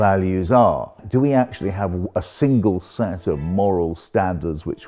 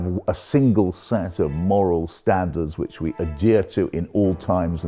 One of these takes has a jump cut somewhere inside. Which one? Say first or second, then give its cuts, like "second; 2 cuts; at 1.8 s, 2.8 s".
first; 1 cut; at 0.9 s